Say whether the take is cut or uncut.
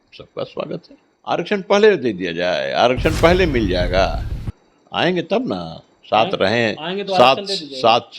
cut